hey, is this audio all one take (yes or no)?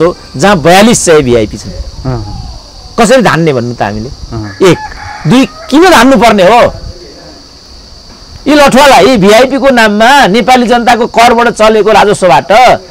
yes